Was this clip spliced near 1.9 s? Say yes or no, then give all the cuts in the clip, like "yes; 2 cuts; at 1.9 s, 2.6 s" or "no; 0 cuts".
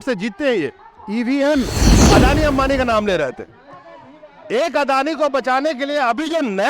yes; 1 cut; at 1.9 s